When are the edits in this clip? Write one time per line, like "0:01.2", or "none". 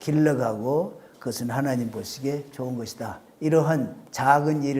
0:03.2